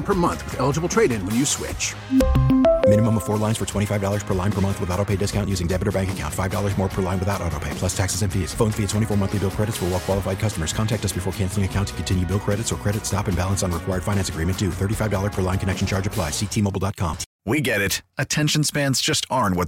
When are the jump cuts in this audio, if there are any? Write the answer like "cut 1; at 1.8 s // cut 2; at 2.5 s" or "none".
cut 1; at 17.3 s